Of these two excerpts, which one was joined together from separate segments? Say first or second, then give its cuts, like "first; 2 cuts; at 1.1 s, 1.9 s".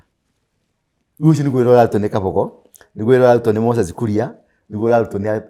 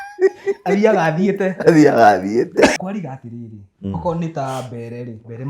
second; 1 cut; at 2.8 s